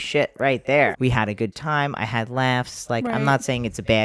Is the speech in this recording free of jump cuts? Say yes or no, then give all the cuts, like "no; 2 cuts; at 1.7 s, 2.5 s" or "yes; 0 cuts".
no; 1 cut; at 1.0 s